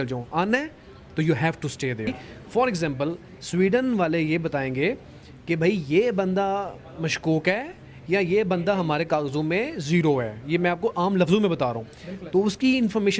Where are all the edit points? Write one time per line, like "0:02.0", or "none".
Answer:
0:02.3